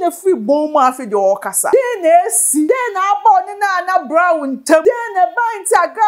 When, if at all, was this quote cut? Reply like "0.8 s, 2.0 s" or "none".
1.6 s, 2.7 s, 4.8 s